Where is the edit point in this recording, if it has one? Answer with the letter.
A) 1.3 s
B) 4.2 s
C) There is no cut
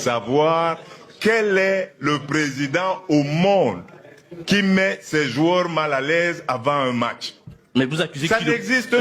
C